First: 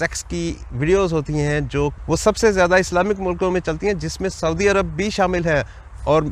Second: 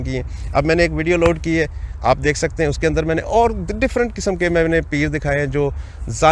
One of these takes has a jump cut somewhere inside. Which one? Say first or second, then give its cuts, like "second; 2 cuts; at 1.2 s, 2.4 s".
first; 1 cut; at 2.0 s